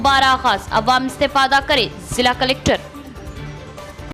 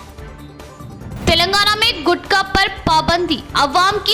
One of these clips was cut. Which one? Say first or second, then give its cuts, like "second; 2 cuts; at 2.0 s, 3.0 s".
second; 1 cut; at 1.2 s